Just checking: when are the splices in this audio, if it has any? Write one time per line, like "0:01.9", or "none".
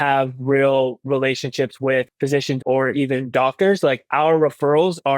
0:02.5